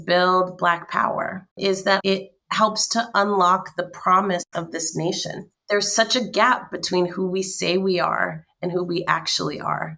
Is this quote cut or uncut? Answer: cut